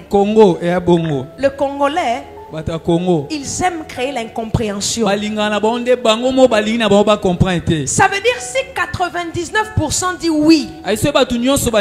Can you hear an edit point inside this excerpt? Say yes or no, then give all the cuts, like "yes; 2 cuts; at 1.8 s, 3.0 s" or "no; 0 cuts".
no; 0 cuts